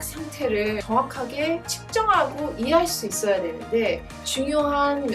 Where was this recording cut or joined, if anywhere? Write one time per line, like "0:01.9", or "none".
0:00.8
0:01.7
0:04.2